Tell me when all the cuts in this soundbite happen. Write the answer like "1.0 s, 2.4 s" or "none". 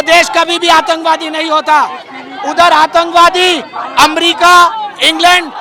none